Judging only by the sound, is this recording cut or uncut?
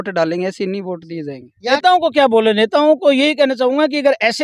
cut